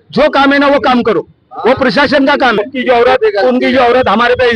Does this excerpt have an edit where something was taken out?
yes; 1 cut; at 2.6 s

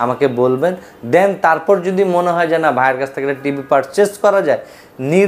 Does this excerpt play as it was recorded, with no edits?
yes; 0 cuts

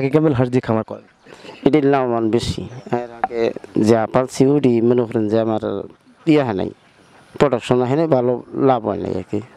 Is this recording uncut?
yes; 0 cuts

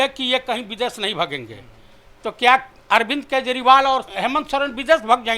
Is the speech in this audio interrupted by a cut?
yes; 1 cut; at 4.1 s

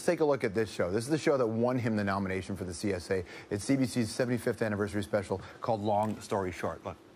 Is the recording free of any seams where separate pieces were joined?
no; 1 cut; at 1.3 s

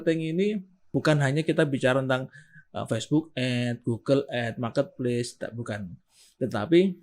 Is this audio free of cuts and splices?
no; 1 cut; at 0.9 s

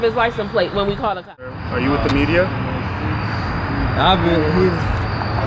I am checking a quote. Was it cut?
yes; 1 cut; at 1.6 s

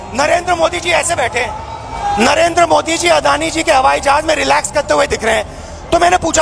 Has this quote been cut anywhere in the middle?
no; 0 cuts

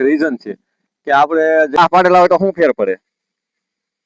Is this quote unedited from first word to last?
no; 1 cut; at 1.8 s

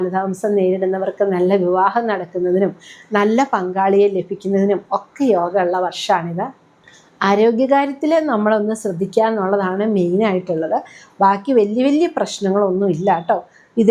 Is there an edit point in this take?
no; 0 cuts

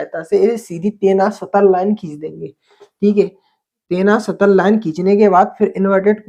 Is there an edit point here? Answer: no; 0 cuts

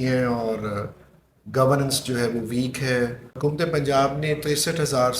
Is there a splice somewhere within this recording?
yes; 1 cut; at 3.3 s

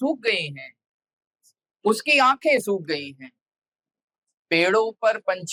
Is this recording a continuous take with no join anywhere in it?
yes; 0 cuts

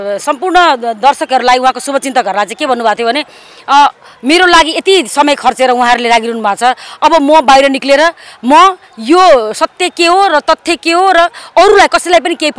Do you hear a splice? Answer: no; 0 cuts

